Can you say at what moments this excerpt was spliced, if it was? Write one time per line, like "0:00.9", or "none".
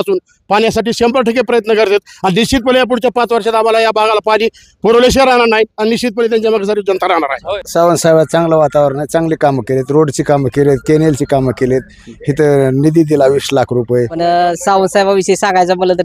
0:07.5
0:14.1